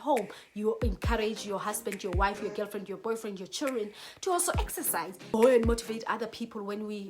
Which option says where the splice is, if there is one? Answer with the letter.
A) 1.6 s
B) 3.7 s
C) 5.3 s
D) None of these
C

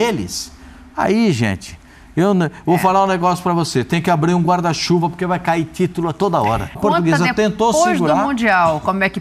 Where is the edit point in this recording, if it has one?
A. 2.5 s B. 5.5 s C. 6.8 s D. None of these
C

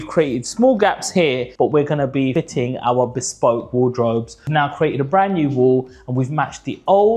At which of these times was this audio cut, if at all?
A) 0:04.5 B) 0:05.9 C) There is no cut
A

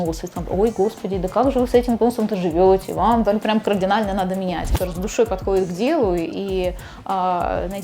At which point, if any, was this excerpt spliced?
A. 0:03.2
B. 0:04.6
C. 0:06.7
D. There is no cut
B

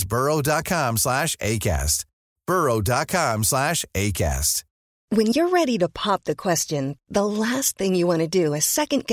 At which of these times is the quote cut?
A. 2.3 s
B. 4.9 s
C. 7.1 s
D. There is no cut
B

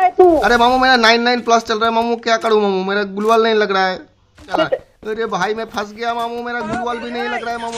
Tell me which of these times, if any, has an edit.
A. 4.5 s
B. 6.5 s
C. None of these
A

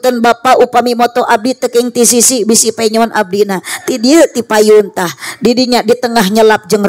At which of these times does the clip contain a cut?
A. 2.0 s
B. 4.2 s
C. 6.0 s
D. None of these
D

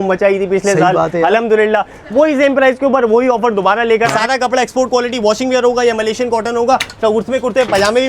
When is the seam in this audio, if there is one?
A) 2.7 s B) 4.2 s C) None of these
B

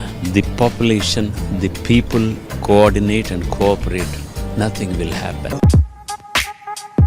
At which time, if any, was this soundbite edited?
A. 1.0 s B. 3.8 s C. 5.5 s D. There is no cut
C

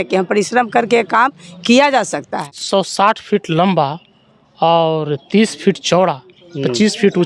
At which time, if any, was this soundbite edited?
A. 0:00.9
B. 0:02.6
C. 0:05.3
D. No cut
B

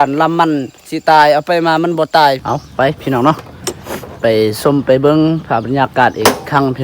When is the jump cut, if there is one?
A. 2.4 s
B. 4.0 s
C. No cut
A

